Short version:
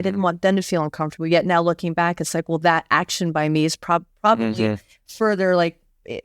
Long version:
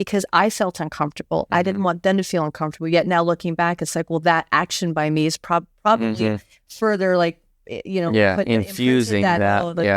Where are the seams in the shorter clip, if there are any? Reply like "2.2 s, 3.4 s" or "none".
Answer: none